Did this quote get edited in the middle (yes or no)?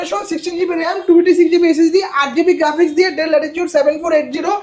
no